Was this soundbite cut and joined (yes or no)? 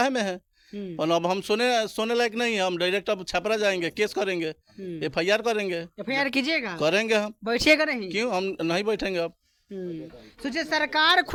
no